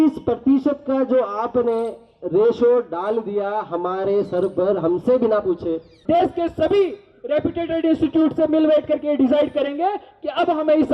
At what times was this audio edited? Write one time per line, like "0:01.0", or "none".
0:05.9